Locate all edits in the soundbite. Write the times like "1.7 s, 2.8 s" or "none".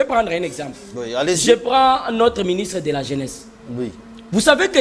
none